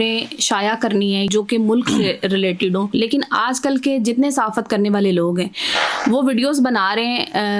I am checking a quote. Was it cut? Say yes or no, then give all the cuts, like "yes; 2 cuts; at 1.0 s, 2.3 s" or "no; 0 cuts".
yes; 2 cuts; at 1.3 s, 2.9 s